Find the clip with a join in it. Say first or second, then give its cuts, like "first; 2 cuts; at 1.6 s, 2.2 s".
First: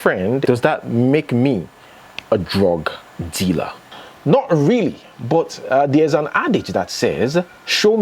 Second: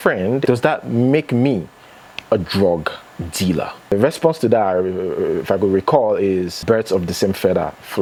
first; 1 cut; at 3.8 s